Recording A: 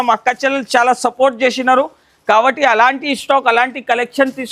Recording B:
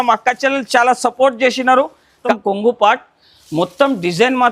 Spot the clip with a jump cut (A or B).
B